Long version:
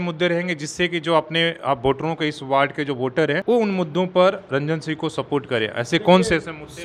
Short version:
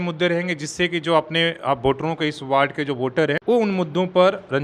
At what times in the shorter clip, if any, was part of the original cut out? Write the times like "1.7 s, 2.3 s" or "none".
none

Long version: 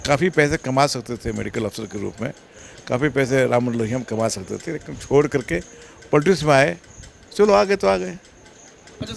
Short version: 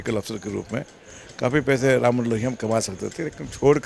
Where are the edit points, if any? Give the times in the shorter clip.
none

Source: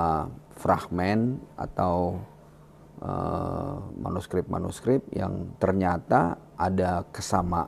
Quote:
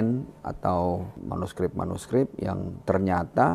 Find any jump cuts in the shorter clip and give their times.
1.2 s

